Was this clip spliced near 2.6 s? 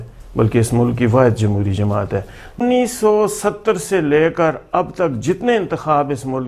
yes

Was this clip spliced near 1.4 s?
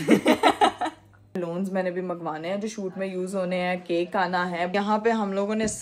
yes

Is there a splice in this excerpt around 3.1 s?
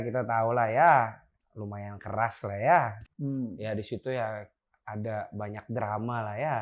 yes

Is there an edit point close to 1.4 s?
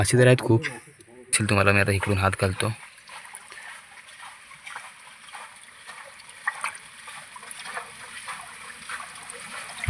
yes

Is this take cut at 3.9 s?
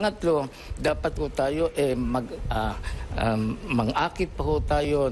yes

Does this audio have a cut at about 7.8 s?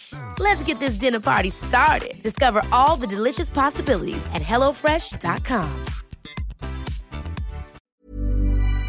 yes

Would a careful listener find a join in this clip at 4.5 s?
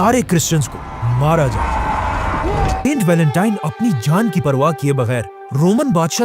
no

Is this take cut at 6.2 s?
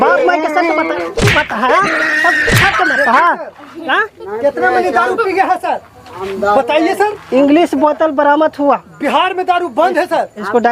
no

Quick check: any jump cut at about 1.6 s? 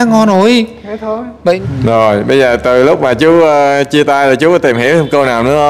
yes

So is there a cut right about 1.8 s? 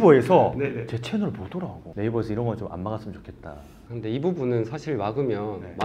yes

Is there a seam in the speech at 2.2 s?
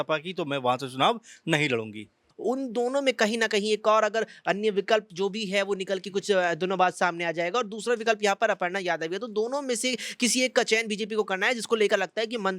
yes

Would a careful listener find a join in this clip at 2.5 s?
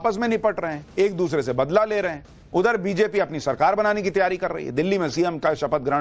no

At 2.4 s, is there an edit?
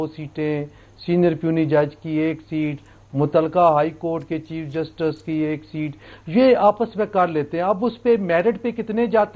no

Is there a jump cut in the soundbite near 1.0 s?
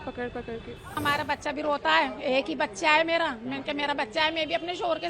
yes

